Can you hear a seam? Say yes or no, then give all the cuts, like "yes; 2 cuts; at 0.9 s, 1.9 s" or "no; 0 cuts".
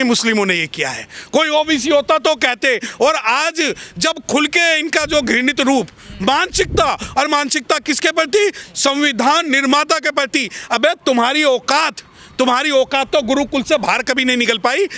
no; 0 cuts